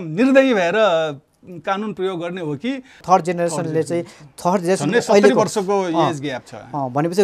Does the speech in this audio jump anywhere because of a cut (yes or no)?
yes